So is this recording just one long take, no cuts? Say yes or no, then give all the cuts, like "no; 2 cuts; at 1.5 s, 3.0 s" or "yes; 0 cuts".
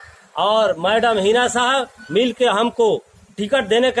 yes; 0 cuts